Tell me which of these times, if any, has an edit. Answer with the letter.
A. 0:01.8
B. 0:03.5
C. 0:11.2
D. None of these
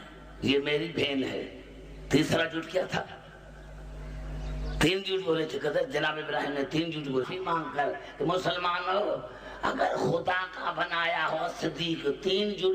D